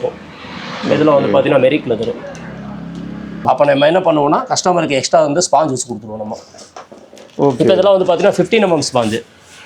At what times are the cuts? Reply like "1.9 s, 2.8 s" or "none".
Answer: 3.4 s